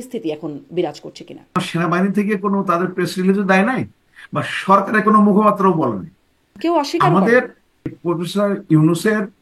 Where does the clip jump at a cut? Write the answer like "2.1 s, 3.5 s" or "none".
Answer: 1.5 s, 6.6 s, 8.0 s